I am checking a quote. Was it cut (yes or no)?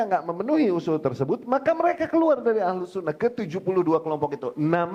no